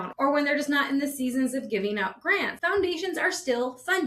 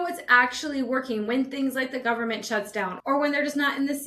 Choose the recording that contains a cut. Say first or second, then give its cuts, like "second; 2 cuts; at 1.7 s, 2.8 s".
first; 1 cut; at 2.5 s